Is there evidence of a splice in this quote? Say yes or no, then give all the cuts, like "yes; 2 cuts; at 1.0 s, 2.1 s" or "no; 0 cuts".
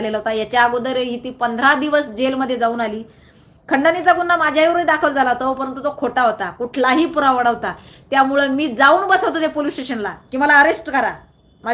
no; 0 cuts